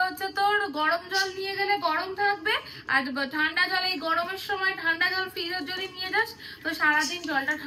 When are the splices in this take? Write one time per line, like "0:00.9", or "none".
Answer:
none